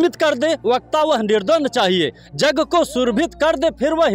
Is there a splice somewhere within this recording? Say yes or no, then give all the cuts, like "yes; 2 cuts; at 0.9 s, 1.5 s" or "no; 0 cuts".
no; 0 cuts